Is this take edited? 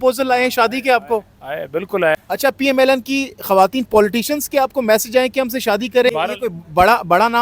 yes; 2 cuts; at 2.1 s, 6.1 s

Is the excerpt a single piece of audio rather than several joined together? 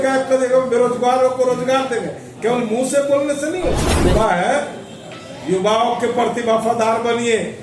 no; 1 cut; at 3.9 s

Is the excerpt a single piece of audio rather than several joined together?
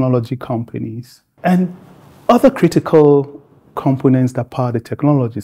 no; 1 cut; at 1.3 s

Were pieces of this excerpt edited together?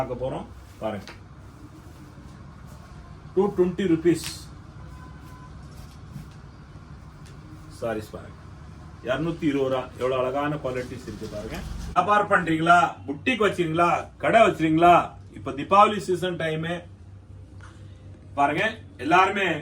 yes; 1 cut; at 12.0 s

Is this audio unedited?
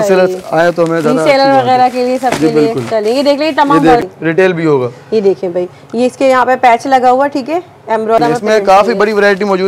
no; 2 cuts; at 4.0 s, 8.2 s

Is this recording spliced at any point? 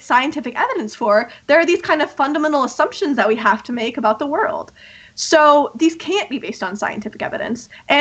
no; 0 cuts

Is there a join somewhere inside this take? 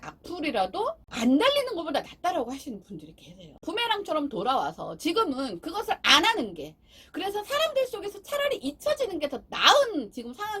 yes; 2 cuts; at 1.1 s, 3.5 s

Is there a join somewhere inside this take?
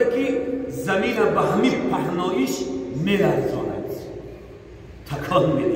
no; 0 cuts

